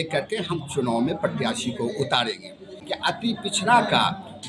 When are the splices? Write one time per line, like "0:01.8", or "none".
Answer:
0:02.8